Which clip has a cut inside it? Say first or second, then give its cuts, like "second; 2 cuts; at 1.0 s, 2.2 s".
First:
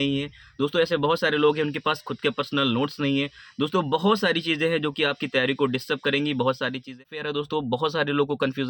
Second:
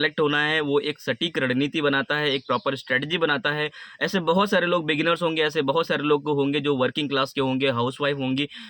first; 1 cut; at 7.0 s